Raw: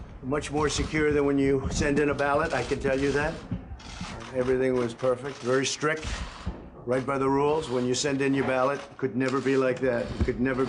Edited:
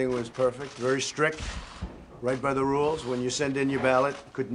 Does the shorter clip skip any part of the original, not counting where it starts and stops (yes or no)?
no